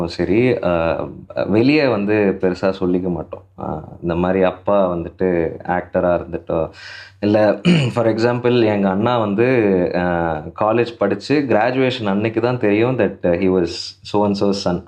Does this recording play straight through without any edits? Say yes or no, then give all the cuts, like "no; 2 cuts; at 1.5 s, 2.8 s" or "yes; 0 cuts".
yes; 0 cuts